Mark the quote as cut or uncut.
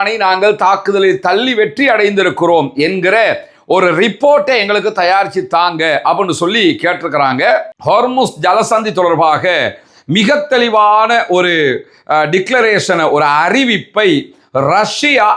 cut